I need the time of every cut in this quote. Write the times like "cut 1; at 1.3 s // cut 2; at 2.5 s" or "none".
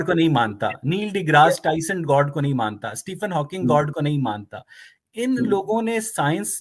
none